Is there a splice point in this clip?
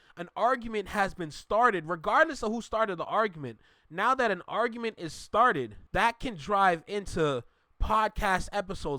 yes; 1 cut; at 5.8 s

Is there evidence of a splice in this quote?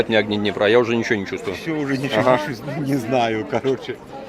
no; 0 cuts

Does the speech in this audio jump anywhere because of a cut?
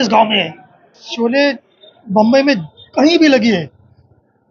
yes; 1 cut; at 1.0 s

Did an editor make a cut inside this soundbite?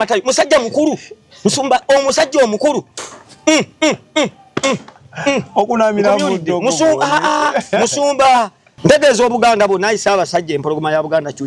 yes; 1 cut; at 8.6 s

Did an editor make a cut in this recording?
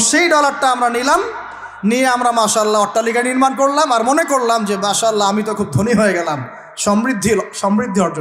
no; 0 cuts

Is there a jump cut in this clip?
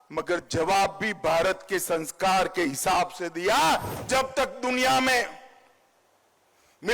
yes; 1 cut; at 3.9 s

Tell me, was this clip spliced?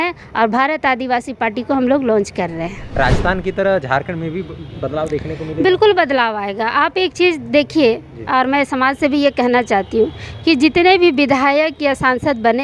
yes; 1 cut; at 2.8 s

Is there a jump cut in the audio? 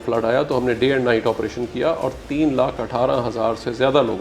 no; 0 cuts

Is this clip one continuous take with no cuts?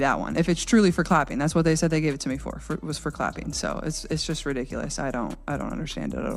no; 1 cut; at 3.8 s

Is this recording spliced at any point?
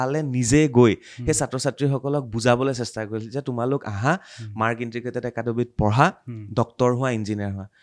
no; 0 cuts

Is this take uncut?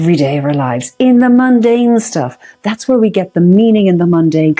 yes; 0 cuts

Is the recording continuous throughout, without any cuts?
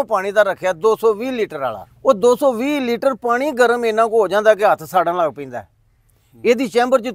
no; 1 cut; at 1.9 s

